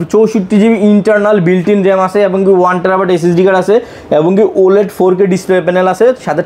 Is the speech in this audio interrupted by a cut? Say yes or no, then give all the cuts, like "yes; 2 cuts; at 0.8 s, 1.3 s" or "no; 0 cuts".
no; 0 cuts